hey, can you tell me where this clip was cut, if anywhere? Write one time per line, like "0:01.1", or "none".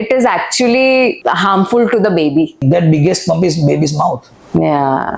0:01.2
0:02.6